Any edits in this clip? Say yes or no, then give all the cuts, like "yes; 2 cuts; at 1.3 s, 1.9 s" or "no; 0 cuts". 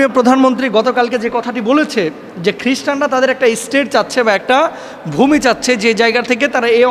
no; 0 cuts